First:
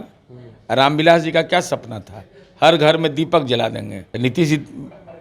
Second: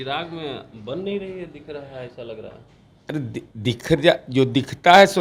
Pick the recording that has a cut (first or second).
first